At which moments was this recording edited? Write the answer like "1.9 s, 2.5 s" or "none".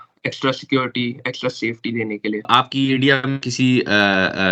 2.5 s